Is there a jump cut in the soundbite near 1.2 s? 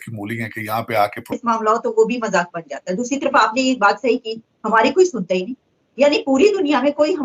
yes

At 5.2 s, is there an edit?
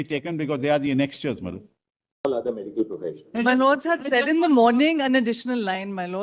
no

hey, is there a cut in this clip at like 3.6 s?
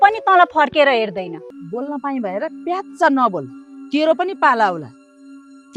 no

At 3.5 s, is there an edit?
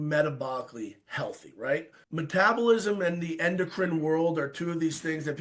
no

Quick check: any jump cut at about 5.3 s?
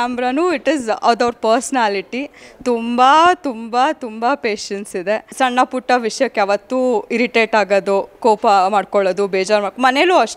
no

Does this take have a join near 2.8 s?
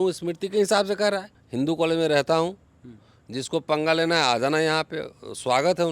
no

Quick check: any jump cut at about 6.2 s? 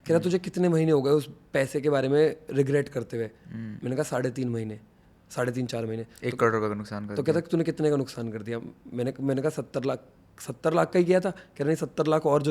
no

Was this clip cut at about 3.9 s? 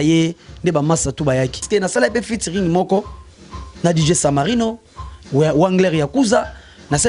no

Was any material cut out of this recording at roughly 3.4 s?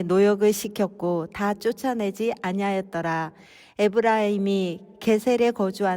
yes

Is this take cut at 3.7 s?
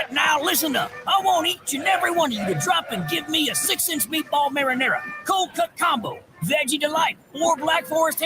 no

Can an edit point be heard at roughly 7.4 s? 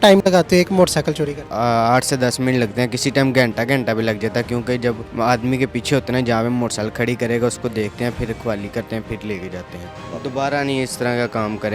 no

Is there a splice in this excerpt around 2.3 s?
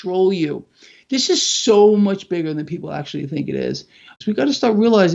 no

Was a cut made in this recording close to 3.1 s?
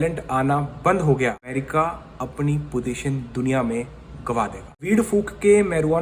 no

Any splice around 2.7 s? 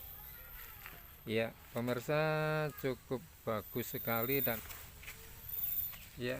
no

